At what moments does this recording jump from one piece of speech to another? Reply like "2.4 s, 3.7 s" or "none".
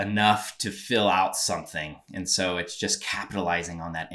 none